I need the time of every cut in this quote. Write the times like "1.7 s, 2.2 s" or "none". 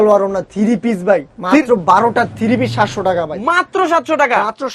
none